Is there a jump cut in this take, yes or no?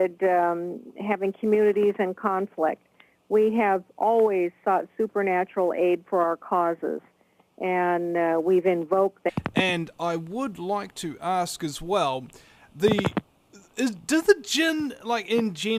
no